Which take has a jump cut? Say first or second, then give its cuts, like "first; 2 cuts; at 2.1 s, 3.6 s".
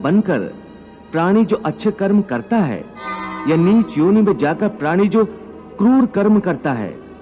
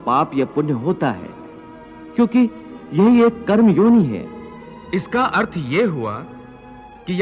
first; 1 cut; at 3.3 s